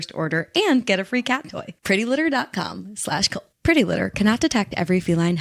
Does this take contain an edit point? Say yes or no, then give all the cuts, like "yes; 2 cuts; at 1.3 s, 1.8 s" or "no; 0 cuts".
no; 0 cuts